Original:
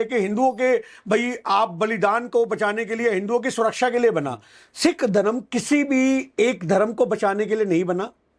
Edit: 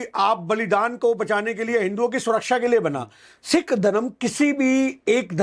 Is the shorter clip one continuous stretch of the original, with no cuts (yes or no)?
yes